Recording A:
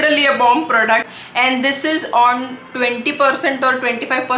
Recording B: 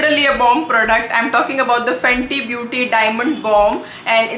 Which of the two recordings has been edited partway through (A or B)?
A